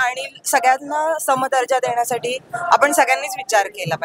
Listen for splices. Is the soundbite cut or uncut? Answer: uncut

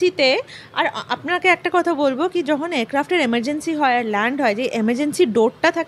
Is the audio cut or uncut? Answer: uncut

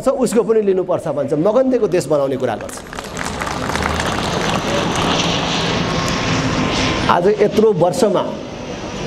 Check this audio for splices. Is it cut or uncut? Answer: uncut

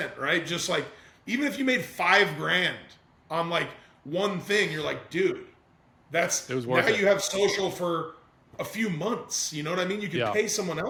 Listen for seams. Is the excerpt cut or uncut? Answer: uncut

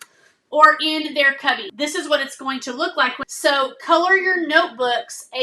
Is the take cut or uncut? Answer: cut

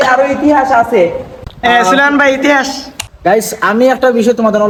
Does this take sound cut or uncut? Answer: uncut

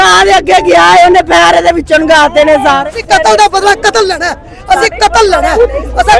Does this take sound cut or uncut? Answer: cut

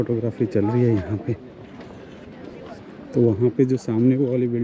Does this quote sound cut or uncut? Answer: uncut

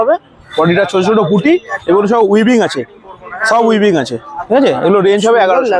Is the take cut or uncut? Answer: uncut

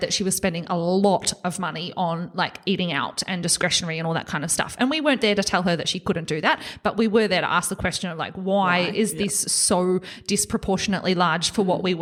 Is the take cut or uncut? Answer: uncut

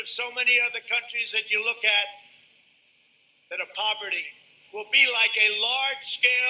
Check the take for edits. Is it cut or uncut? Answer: cut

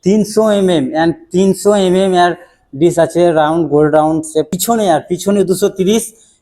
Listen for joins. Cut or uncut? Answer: cut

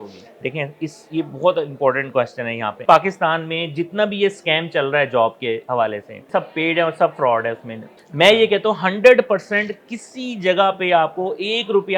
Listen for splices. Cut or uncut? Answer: cut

